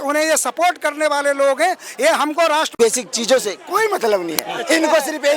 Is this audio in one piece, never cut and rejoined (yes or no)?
no